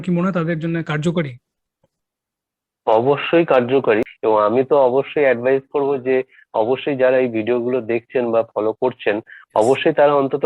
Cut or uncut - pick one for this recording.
cut